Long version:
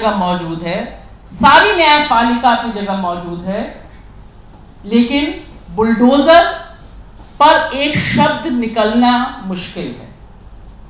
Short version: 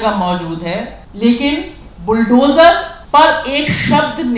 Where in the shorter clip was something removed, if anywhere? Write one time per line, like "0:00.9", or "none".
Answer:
0:01.0
0:02.9